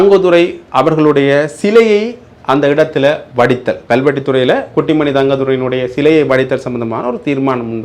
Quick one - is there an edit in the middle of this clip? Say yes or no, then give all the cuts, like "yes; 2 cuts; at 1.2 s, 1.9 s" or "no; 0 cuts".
no; 0 cuts